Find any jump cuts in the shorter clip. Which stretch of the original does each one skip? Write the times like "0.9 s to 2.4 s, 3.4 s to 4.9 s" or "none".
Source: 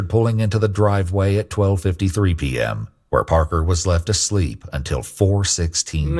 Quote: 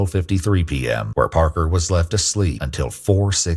2.8 s to 3.0 s, 4.6 s to 4.8 s